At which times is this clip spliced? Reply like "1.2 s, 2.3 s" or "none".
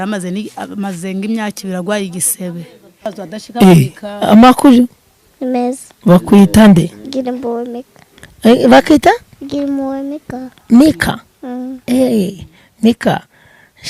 3.1 s